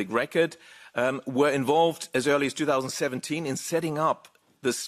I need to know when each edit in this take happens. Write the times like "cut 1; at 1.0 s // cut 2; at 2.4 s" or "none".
none